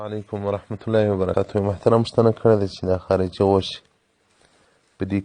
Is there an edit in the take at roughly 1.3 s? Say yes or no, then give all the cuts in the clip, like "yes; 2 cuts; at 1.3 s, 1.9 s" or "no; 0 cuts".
yes; 1 cut; at 1.3 s